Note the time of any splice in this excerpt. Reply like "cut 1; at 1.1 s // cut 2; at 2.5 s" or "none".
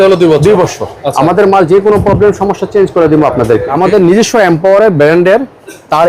cut 1; at 3.7 s